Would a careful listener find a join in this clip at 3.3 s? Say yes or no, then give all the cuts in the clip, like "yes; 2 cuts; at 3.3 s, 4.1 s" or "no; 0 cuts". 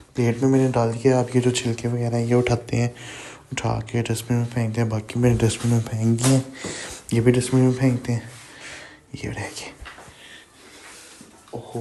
no; 0 cuts